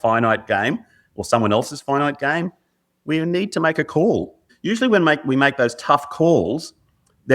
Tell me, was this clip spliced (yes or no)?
yes